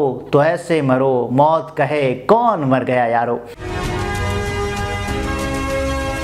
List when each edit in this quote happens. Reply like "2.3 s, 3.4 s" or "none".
3.6 s